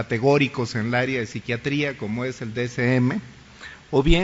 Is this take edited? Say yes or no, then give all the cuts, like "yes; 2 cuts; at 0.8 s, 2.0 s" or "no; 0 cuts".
yes; 1 cut; at 3.1 s